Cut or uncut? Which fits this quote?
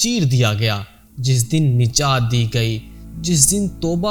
uncut